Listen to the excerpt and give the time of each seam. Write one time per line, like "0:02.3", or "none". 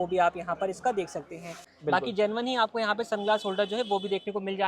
0:01.7